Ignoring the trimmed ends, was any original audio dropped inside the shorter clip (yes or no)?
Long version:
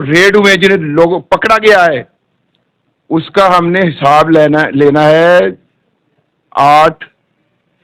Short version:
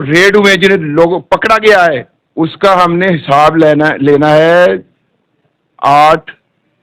yes